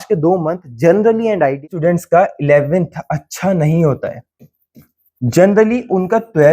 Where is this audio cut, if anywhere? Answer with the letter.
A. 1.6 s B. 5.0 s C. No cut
A